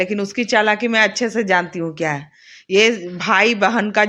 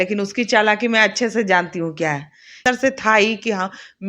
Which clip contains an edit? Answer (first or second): second